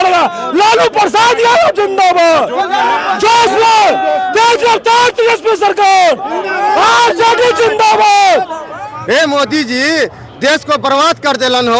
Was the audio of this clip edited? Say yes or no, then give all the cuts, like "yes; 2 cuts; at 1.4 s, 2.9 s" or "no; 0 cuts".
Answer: yes; 1 cut; at 8.9 s